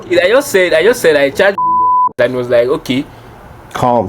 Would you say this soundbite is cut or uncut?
uncut